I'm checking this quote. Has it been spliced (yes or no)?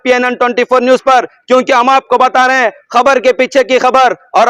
no